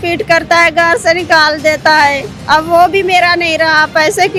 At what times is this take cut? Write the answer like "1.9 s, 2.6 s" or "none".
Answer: none